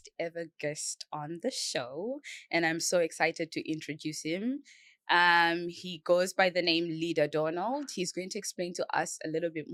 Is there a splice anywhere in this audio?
no; 0 cuts

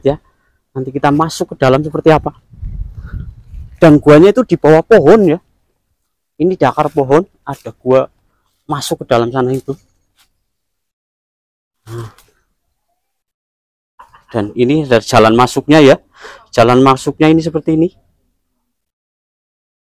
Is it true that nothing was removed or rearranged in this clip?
yes; 0 cuts

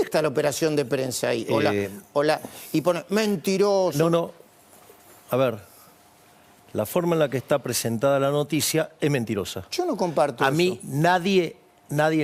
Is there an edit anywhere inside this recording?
no; 0 cuts

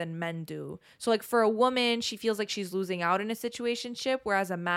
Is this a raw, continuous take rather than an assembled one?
yes; 0 cuts

